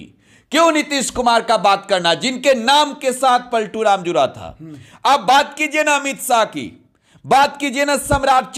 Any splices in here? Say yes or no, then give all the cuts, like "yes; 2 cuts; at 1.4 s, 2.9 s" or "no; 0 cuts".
no; 0 cuts